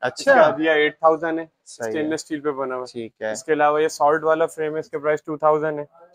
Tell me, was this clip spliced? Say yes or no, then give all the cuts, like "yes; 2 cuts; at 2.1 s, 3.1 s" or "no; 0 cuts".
no; 0 cuts